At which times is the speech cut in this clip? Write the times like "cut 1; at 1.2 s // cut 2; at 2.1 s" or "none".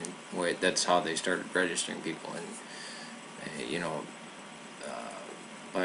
cut 1; at 1.1 s